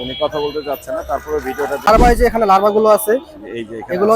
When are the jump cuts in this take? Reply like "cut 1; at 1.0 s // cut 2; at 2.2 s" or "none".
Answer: cut 1; at 1.9 s